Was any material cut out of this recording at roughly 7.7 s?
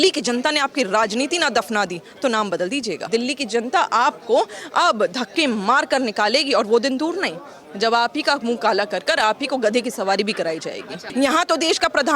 no; 2 cuts; at 3.0 s, 11.0 s

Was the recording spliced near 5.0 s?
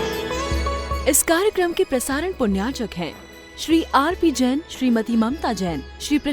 no; 1 cut; at 1.0 s

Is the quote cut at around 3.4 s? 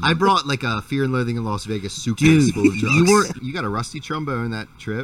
yes; 1 cut; at 3.4 s

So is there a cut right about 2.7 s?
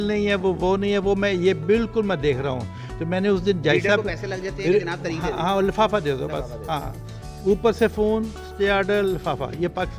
no; 0 cuts

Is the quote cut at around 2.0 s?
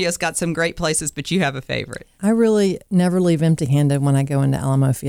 yes; 2 cuts; at 2.0 s, 2.8 s

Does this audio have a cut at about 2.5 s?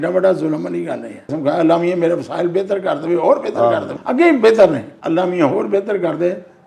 no; 3 cuts; at 1.3 s, 3.9 s, 4.9 s

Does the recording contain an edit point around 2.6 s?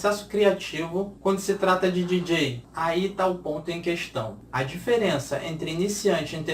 yes; 3 cuts; at 1.1 s, 2.6 s, 4.4 s

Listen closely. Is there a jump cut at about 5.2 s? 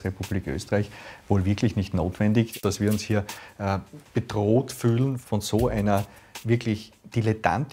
yes; 2 cuts; at 2.5 s, 5.2 s

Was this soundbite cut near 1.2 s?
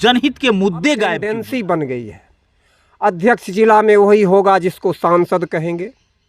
yes; 1 cut; at 1.2 s

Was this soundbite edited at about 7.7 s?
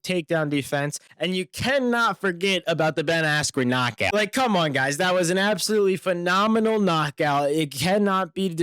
no; 1 cut; at 4.1 s

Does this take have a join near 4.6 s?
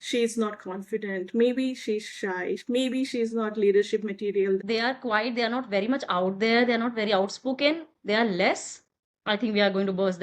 yes; 1 cut; at 4.6 s

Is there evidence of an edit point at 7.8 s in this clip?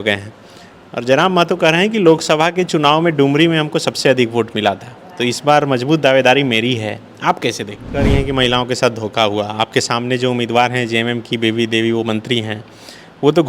yes; 1 cut; at 7.8 s

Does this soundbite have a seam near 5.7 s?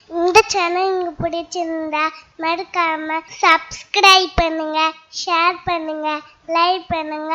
no; 1 cut; at 3.3 s

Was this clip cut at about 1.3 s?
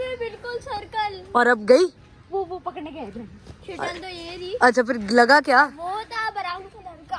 no; 0 cuts

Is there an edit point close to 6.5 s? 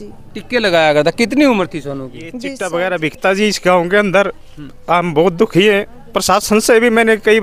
no; 1 cut; at 2.5 s

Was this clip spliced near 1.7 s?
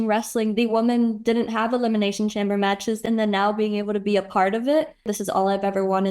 no; 2 cuts; at 3.0 s, 5.1 s

